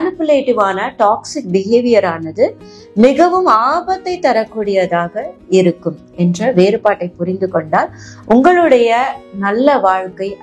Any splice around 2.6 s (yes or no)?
no